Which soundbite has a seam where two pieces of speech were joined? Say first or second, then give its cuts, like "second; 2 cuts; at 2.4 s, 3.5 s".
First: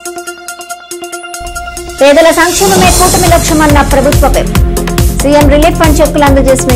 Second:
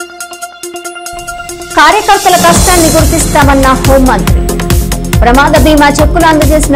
first; 1 cut; at 1.0 s